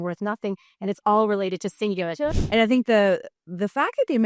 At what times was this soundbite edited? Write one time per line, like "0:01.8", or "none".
0:02.4